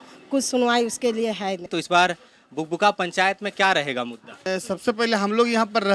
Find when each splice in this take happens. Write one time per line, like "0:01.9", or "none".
0:01.6
0:04.4